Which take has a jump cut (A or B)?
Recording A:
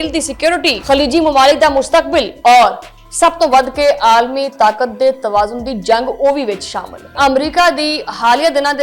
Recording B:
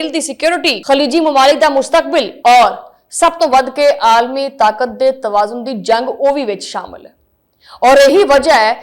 A